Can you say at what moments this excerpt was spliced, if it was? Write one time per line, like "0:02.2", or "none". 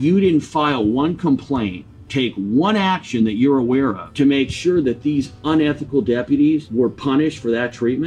0:04.0
0:06.7